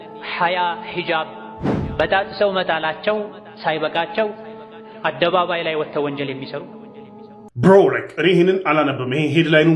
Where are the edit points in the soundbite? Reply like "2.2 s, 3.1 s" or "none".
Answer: 7.4 s